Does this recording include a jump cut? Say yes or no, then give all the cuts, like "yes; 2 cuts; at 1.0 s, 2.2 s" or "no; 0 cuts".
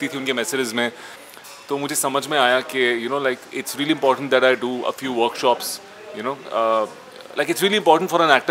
yes; 1 cut; at 1.2 s